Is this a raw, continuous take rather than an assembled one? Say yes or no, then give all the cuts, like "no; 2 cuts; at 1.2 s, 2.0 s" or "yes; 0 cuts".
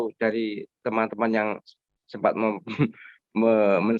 yes; 0 cuts